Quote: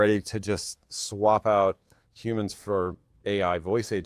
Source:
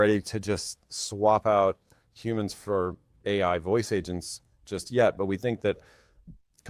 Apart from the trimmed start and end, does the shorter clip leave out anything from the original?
no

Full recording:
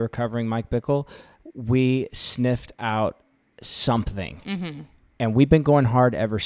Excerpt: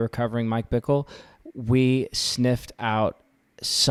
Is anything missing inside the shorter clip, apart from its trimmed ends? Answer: no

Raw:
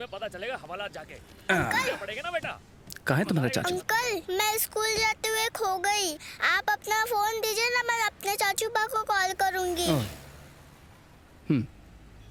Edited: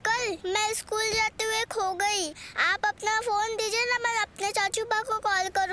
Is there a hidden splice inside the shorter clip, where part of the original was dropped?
no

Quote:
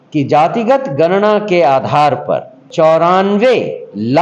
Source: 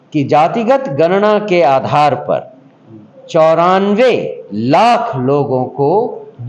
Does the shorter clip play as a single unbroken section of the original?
no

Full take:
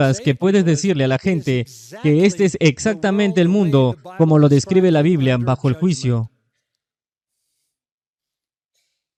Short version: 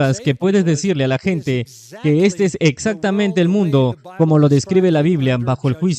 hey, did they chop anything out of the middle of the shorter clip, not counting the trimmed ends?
no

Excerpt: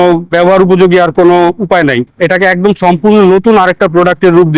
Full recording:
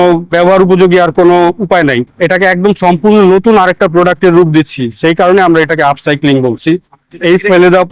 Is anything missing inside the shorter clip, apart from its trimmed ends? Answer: no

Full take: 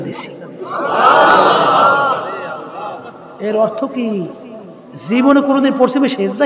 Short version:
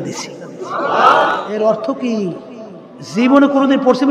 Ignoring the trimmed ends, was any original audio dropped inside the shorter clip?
yes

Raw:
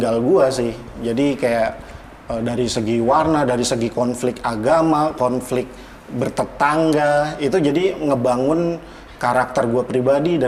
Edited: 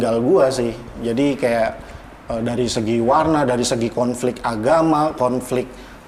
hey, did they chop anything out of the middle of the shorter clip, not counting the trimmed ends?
no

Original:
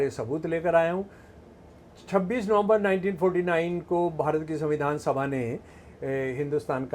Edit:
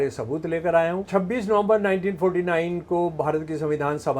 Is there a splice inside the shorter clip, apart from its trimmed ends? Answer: yes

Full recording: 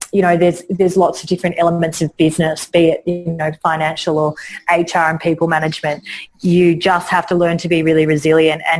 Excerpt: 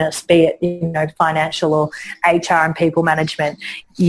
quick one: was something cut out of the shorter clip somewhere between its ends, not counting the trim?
no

